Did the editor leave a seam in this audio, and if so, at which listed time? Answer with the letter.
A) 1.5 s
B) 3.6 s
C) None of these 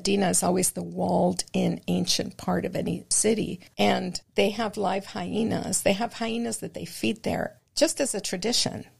B